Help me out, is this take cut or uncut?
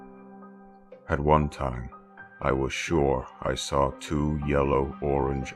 uncut